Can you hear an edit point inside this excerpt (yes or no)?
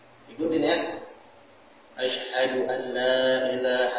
no